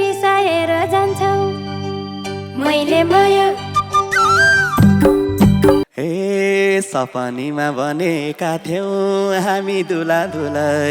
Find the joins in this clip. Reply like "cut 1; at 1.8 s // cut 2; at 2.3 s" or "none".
cut 1; at 5.9 s